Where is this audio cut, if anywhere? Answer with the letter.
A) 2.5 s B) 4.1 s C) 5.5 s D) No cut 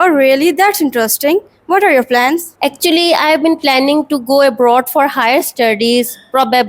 A